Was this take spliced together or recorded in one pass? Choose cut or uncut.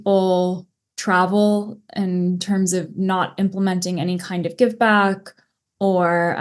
uncut